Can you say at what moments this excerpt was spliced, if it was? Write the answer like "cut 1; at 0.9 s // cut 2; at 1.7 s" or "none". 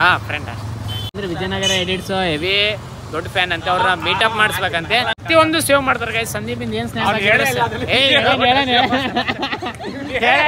cut 1; at 1.2 s // cut 2; at 5.2 s